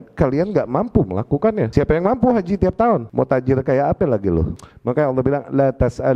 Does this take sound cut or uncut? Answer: cut